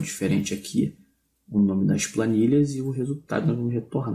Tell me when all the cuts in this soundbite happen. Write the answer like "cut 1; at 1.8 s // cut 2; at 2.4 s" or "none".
cut 1; at 1.8 s